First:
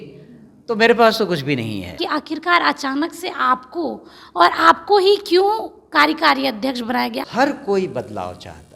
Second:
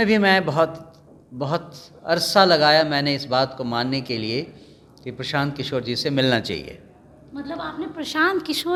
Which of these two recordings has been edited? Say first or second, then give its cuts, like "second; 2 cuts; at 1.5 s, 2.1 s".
first; 2 cuts; at 2.0 s, 7.2 s